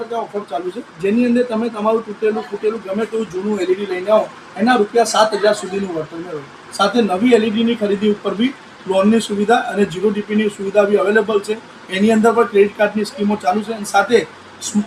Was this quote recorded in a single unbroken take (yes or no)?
yes